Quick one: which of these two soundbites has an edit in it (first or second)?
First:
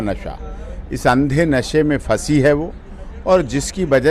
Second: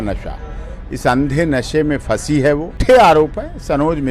second